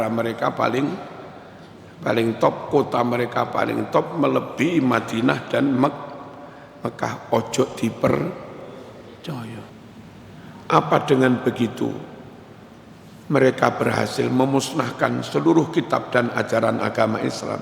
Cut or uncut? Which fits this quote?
cut